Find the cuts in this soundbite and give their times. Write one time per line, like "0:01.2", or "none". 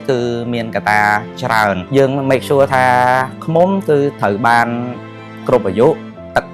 0:01.8